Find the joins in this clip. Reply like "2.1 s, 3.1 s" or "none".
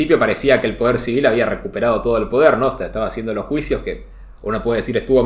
none